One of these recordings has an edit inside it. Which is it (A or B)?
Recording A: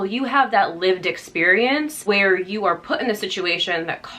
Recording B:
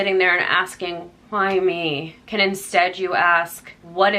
A